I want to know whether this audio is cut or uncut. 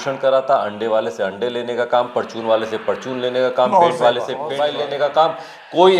cut